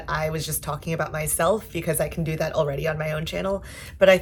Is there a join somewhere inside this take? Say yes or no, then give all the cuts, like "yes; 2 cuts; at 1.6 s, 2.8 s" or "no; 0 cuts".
no; 0 cuts